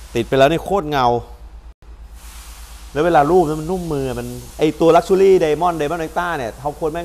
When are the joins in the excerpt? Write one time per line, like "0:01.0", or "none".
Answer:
none